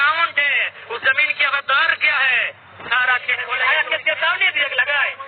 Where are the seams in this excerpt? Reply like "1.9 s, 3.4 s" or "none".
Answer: 3.6 s